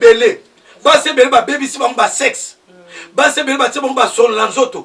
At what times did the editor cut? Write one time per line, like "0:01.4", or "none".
none